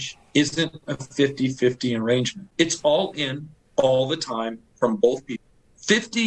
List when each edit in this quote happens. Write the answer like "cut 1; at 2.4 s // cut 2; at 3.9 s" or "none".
cut 1; at 2.4 s // cut 2; at 5.3 s